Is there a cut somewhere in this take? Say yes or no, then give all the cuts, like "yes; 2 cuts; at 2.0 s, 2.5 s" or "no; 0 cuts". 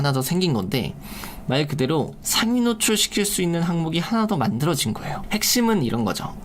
yes; 1 cut; at 5.1 s